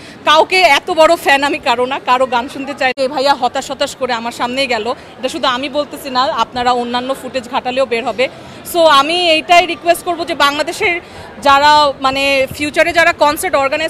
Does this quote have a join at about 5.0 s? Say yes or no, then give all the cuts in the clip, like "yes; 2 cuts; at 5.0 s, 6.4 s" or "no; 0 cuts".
no; 1 cut; at 2.9 s